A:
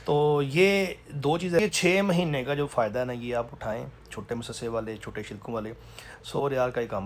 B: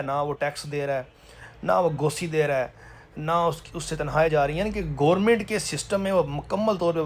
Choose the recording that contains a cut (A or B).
A